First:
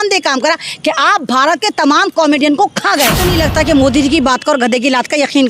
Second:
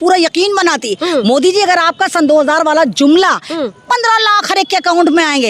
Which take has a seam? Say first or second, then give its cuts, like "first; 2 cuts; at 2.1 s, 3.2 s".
first; 1 cut; at 3.3 s